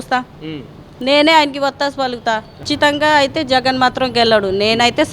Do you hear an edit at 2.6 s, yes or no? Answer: yes